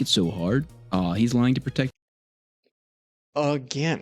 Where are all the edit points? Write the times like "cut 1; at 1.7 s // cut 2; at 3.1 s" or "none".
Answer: cut 1; at 1.9 s